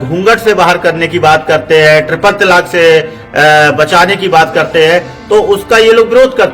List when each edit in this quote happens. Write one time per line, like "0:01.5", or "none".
none